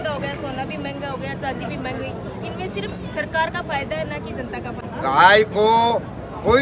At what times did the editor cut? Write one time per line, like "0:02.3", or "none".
0:04.9